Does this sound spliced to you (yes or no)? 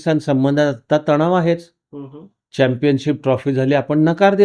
no